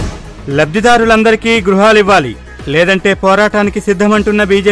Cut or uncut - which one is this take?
uncut